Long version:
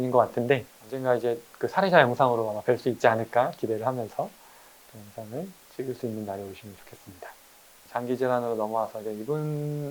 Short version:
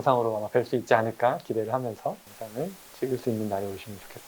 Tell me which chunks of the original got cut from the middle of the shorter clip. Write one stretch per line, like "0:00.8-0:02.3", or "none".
0:04.5-0:05.1